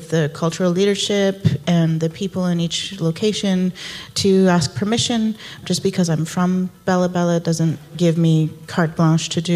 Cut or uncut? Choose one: cut